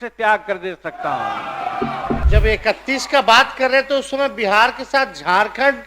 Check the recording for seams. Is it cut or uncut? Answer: cut